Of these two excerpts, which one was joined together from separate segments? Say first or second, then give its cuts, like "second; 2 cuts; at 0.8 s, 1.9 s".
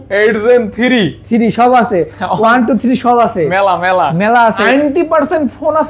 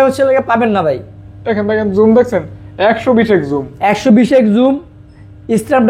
first; 1 cut; at 4.6 s